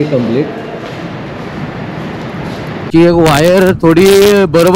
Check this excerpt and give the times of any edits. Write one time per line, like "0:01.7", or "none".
0:02.9